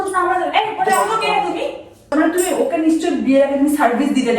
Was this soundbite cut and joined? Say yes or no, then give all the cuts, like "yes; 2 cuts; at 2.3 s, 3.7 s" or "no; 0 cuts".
yes; 1 cut; at 2.1 s